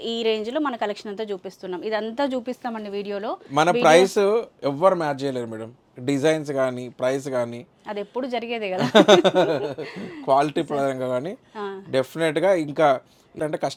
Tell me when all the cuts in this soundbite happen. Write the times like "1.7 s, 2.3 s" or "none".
none